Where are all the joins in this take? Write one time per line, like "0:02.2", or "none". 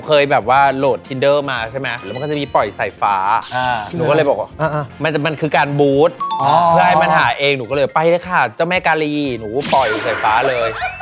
0:02.0